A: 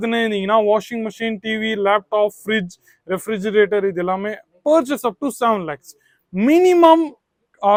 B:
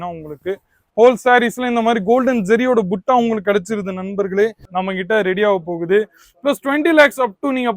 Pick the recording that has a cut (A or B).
B